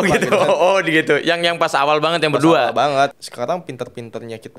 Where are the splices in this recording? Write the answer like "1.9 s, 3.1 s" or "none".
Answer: 3.1 s